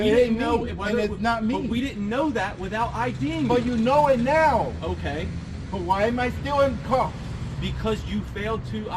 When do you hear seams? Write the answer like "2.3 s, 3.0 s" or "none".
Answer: none